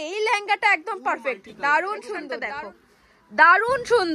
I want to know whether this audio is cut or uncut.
cut